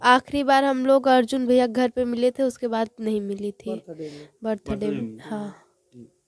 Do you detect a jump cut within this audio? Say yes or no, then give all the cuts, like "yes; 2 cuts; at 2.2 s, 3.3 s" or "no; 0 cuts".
no; 0 cuts